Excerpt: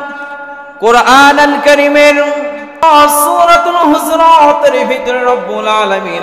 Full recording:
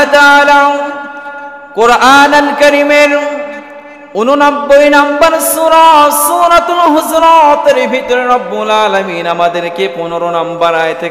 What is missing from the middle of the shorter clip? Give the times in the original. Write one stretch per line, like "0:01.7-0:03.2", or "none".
0:03.8-0:05.9